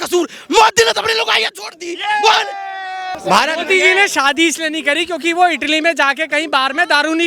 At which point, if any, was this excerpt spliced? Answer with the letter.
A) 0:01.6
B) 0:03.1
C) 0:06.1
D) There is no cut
B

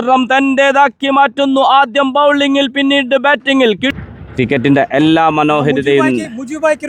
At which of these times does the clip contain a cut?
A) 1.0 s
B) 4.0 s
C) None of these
B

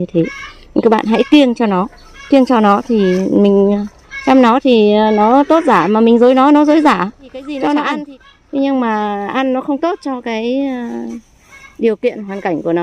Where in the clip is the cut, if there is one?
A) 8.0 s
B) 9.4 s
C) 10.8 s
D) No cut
A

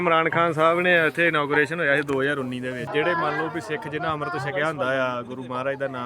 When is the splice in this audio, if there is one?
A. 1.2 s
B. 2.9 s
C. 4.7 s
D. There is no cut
B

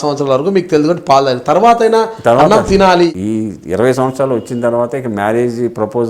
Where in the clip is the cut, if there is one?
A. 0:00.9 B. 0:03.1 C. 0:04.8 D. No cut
B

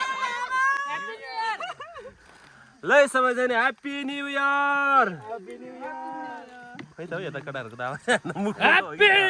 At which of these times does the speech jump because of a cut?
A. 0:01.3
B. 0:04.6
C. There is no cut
C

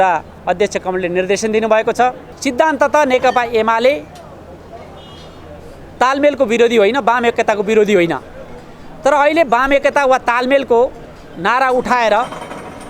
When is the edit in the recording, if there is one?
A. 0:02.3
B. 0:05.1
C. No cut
A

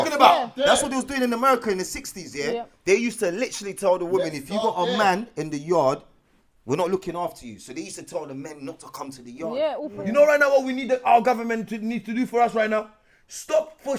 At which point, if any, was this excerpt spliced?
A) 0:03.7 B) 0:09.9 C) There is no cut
B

